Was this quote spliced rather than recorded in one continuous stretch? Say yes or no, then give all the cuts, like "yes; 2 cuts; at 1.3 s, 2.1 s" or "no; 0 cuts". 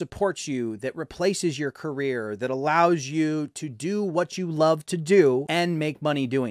yes; 1 cut; at 5.5 s